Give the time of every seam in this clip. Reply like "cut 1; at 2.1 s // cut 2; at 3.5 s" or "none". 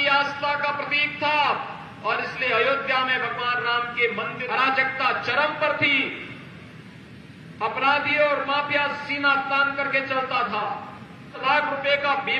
cut 1; at 4.4 s // cut 2; at 11.4 s